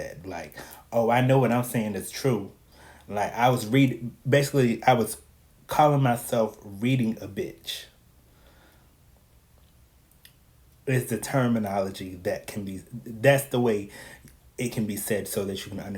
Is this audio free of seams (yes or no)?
yes